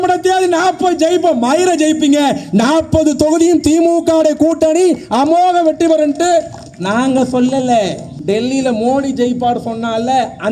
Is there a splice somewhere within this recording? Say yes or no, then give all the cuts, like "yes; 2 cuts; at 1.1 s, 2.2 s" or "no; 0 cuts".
yes; 1 cut; at 8.1 s